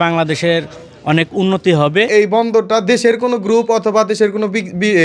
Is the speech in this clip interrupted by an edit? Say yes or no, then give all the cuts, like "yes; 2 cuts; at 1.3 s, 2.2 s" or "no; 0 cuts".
yes; 1 cut; at 2.1 s